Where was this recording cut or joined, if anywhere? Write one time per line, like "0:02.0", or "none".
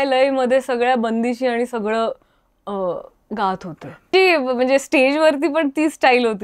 0:04.1